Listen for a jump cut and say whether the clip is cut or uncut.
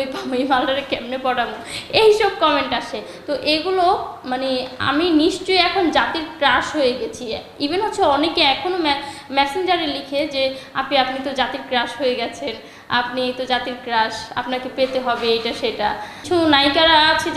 uncut